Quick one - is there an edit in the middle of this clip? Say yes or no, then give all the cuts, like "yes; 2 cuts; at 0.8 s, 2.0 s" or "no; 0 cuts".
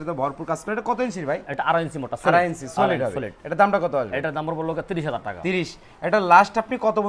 no; 0 cuts